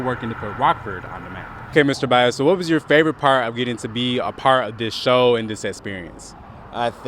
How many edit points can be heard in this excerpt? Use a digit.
1